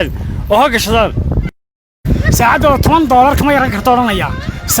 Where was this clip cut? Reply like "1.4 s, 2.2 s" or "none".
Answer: 1.6 s